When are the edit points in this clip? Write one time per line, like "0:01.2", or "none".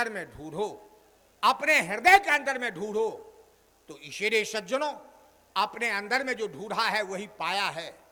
none